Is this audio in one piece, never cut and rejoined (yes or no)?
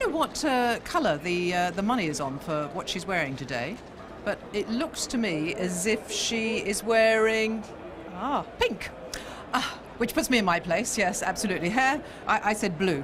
yes